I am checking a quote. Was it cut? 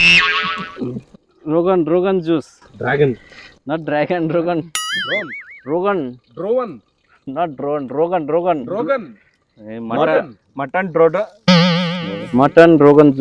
no; 0 cuts

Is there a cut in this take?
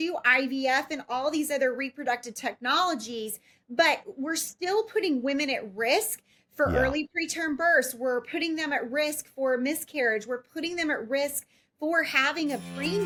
no; 0 cuts

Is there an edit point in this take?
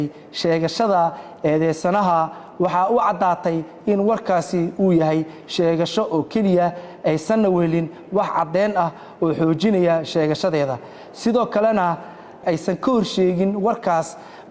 no; 0 cuts

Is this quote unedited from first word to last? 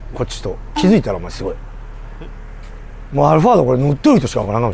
yes; 0 cuts

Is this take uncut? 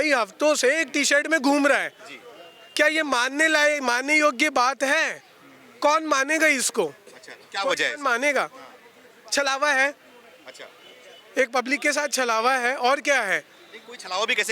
yes; 0 cuts

